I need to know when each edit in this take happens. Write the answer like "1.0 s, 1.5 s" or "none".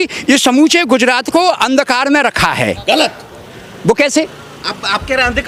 none